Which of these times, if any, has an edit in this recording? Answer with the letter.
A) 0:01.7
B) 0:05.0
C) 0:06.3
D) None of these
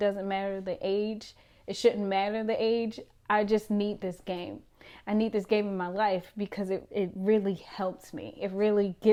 D